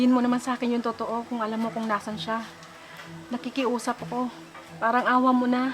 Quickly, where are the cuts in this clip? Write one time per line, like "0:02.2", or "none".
none